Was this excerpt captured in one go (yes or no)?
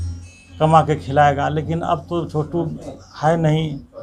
yes